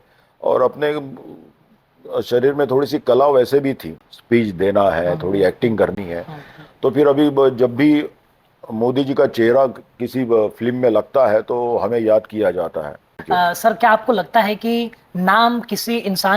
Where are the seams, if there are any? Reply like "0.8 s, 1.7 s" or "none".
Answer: 13.2 s